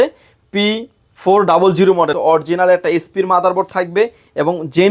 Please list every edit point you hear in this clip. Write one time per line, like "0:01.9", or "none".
0:02.1